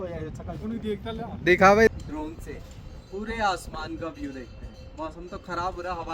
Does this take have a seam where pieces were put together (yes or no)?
yes